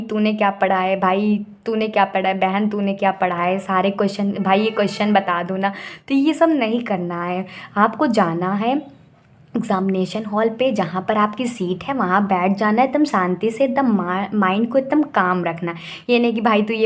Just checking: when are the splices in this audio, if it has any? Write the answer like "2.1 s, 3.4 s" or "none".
none